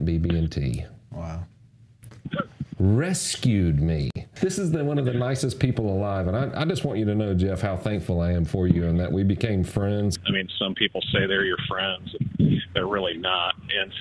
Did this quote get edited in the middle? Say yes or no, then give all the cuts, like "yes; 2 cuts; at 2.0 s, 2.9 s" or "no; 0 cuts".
yes; 2 cuts; at 4.2 s, 10.1 s